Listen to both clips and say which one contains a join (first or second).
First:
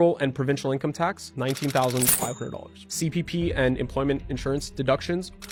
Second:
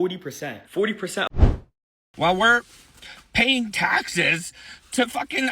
second